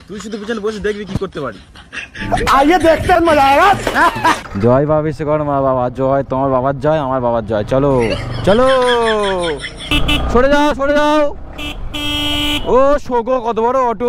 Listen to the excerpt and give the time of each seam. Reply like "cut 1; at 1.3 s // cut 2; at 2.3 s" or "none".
cut 1; at 4.4 s // cut 2; at 9.9 s